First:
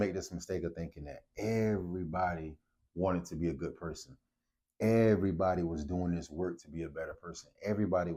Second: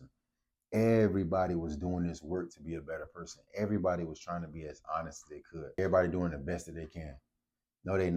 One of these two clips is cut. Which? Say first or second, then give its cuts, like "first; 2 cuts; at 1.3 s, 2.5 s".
second; 1 cut; at 5.6 s